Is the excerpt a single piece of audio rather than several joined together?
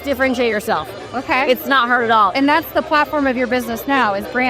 yes; 0 cuts

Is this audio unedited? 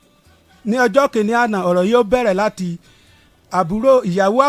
yes; 0 cuts

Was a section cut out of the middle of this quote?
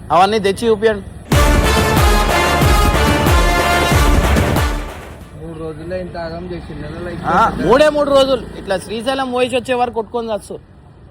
no; 0 cuts

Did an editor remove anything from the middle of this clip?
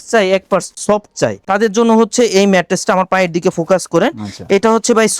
yes; 1 cut; at 1.4 s

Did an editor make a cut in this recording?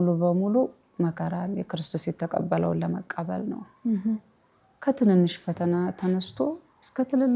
no; 0 cuts

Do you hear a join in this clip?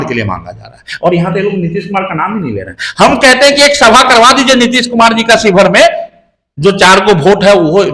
no; 0 cuts

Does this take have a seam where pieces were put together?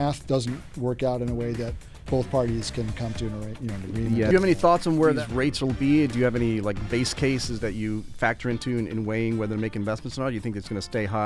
yes; 4 cuts; at 1.9 s, 4.3 s, 5.2 s, 7.6 s

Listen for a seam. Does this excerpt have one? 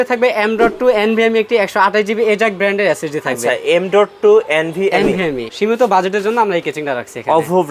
yes; 1 cut; at 5.5 s

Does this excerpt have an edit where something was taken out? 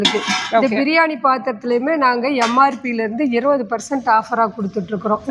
no; 0 cuts

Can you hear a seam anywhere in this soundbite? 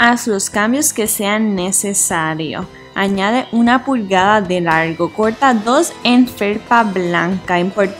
yes; 2 cuts; at 2.8 s, 4.9 s

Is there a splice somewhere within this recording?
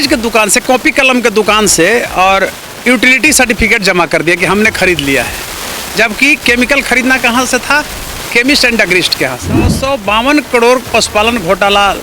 yes; 1 cut; at 9.8 s

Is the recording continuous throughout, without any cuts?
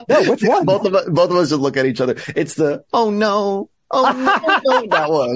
yes; 0 cuts

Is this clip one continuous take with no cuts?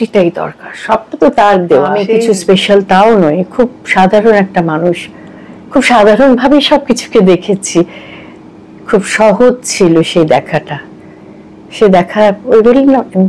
no; 1 cut; at 2.1 s

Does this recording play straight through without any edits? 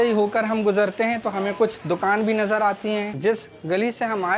no; 1 cut; at 3.1 s

